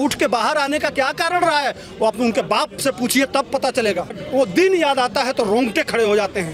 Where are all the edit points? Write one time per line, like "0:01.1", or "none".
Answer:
0:04.2